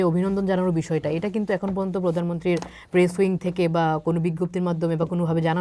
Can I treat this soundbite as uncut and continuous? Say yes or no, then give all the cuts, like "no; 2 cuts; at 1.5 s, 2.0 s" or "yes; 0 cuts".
yes; 0 cuts